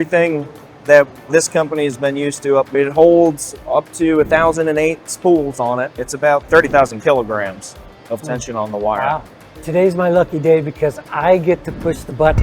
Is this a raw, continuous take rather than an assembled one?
no; 3 cuts; at 2.7 s, 5.9 s, 9.4 s

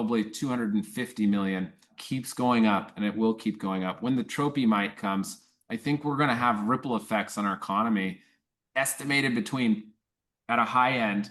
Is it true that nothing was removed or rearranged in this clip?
yes; 0 cuts

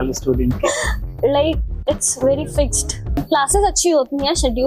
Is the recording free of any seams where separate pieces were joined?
no; 1 cut; at 3.1 s

